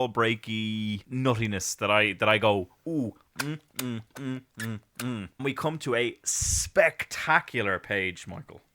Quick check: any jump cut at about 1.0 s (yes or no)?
yes